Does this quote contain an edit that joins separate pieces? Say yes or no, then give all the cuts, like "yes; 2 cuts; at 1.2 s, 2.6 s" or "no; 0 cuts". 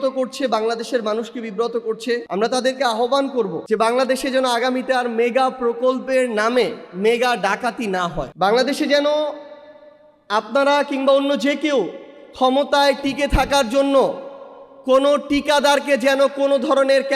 yes; 3 cuts; at 2.2 s, 3.6 s, 8.3 s